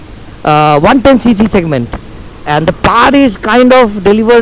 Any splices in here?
no; 0 cuts

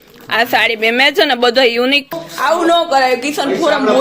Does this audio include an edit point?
yes; 1 cut; at 2.1 s

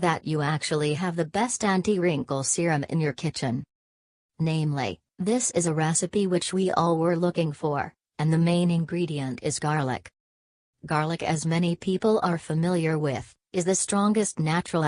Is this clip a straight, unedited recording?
no; 1 cut; at 2.7 s

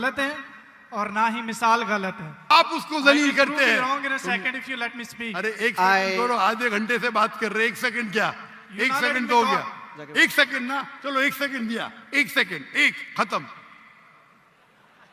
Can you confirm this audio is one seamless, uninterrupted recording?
no; 1 cut; at 2.5 s

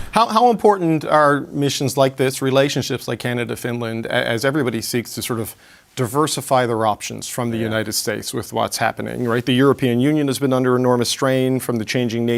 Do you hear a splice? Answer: no; 0 cuts

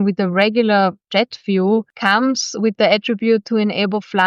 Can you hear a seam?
yes; 2 cuts; at 1.0 s, 1.9 s

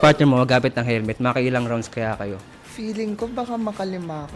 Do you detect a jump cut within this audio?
no; 0 cuts

